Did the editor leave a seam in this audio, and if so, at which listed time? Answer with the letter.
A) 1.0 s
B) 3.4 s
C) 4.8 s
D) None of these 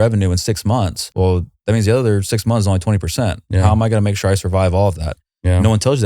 A